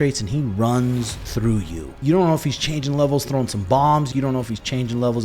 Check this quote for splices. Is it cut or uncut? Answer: cut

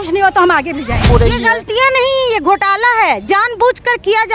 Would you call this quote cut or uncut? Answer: cut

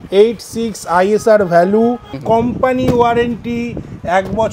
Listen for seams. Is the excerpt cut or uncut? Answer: cut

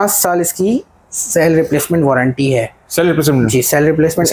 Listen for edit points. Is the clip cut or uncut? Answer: uncut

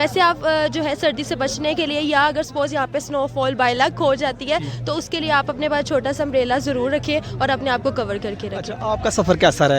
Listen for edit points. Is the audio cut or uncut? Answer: uncut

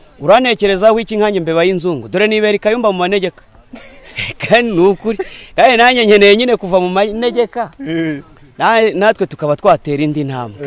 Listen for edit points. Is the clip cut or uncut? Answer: uncut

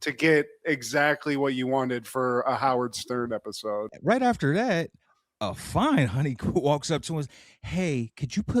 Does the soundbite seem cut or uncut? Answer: cut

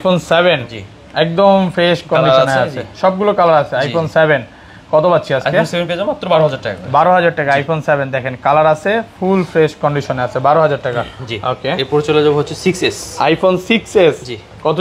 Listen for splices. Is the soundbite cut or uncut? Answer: uncut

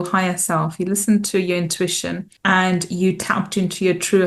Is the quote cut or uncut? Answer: cut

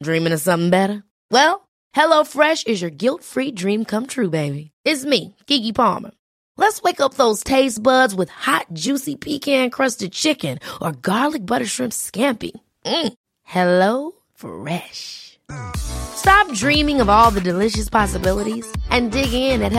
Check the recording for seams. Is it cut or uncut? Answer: uncut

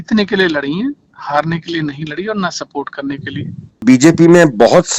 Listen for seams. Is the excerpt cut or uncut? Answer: cut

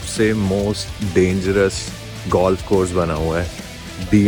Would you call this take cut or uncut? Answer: uncut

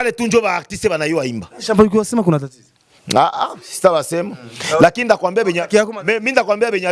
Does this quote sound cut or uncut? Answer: uncut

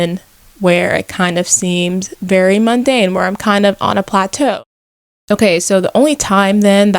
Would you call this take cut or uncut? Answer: cut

